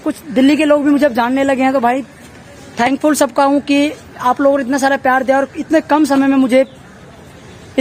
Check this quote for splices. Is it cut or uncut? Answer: uncut